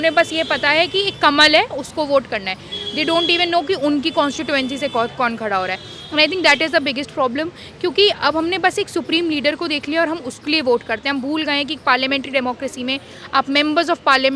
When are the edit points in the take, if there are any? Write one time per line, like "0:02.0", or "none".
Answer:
none